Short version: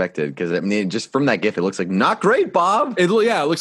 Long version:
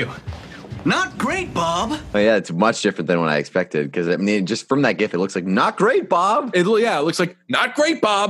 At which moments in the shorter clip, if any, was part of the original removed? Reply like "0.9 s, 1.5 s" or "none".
none